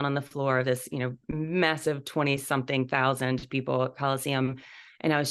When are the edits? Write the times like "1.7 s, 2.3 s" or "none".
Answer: none

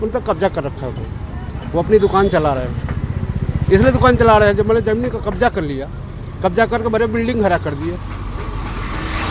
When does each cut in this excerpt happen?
none

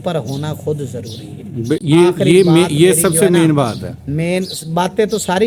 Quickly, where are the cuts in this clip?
none

